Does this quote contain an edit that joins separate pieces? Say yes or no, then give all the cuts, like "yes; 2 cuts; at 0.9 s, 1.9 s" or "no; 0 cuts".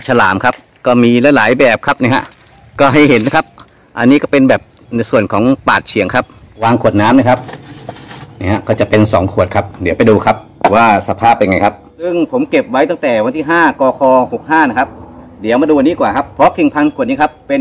yes; 2 cuts; at 6.6 s, 12.1 s